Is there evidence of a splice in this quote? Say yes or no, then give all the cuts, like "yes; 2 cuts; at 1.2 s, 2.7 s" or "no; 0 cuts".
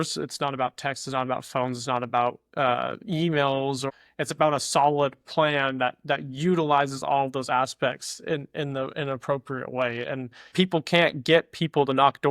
yes; 2 cuts; at 3.9 s, 10.4 s